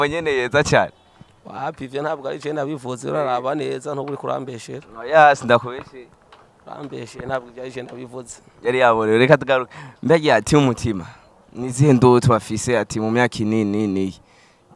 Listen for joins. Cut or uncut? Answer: uncut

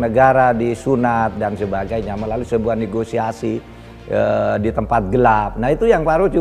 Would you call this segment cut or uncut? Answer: uncut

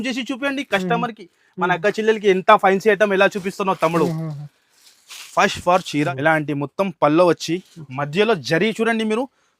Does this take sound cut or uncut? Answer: cut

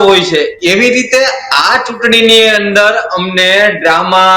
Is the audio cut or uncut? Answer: uncut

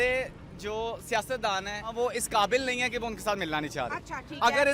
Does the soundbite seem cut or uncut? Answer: cut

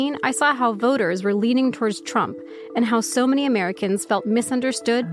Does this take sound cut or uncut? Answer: uncut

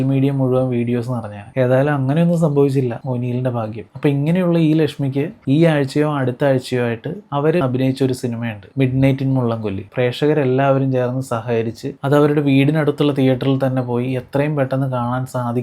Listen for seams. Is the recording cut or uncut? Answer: cut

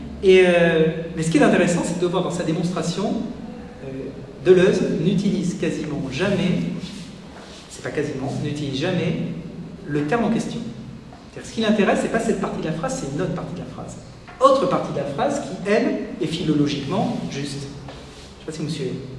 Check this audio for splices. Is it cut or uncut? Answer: uncut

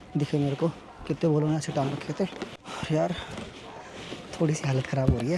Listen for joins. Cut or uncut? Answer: uncut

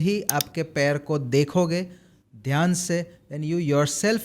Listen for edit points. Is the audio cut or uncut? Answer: uncut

